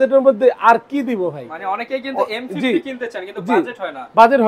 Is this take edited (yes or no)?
no